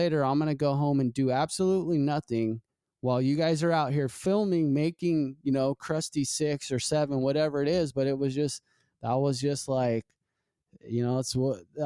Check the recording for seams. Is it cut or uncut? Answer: uncut